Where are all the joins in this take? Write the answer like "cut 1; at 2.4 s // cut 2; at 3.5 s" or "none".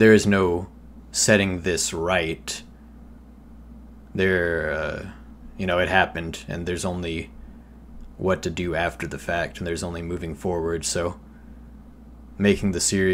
none